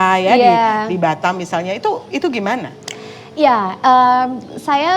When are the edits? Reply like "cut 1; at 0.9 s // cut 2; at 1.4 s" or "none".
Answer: none